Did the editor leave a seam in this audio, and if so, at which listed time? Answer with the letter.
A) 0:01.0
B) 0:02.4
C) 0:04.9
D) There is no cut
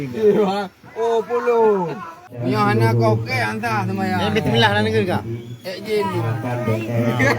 B